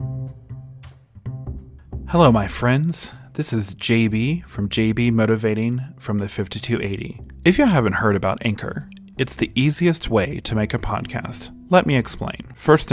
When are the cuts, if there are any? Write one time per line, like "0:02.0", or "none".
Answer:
0:01.7